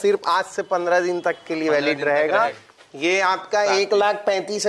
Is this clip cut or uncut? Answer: cut